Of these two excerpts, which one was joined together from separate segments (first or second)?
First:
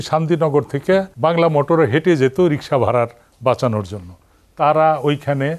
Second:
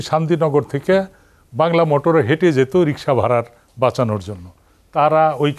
first